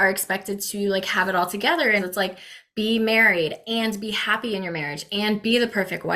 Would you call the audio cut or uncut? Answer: cut